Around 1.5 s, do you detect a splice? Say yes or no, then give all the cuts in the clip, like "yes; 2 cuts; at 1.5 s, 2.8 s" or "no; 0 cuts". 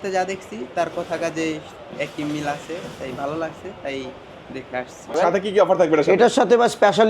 no; 1 cut; at 5.2 s